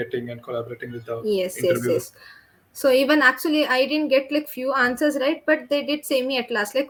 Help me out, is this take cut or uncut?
uncut